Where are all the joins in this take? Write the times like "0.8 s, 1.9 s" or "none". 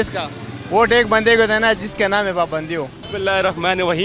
none